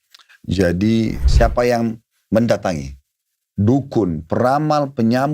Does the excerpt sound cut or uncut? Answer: cut